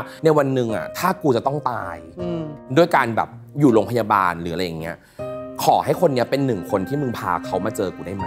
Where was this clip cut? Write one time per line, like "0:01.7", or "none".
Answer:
none